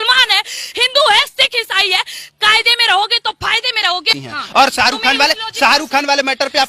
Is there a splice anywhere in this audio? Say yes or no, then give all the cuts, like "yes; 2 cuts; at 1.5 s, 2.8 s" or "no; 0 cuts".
yes; 1 cut; at 4.2 s